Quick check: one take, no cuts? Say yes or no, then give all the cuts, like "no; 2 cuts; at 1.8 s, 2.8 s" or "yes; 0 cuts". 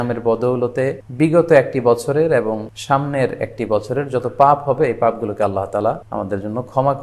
no; 3 cuts; at 1.0 s, 2.7 s, 6.0 s